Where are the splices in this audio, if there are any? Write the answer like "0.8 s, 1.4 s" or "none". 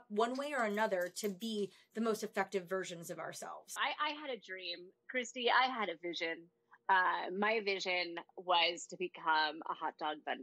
3.7 s